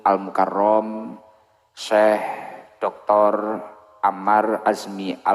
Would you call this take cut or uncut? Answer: uncut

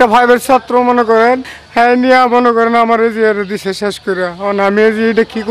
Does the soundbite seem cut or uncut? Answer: cut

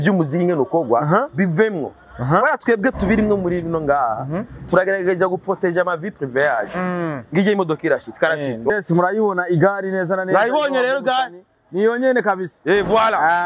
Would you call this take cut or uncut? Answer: cut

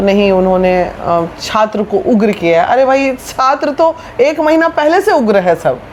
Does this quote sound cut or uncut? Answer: uncut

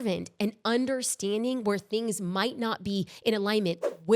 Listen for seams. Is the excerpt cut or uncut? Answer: uncut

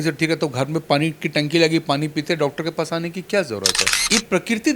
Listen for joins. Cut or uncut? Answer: cut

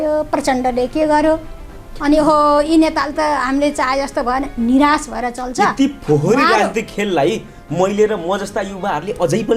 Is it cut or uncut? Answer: uncut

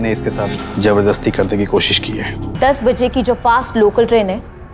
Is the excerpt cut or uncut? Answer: cut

